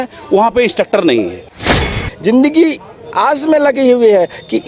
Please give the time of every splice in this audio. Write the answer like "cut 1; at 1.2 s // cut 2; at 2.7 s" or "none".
cut 1; at 1.9 s